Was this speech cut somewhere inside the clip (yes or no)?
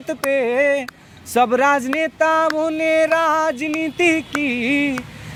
no